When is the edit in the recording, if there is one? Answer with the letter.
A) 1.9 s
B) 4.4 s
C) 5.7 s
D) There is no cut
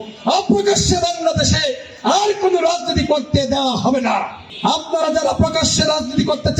B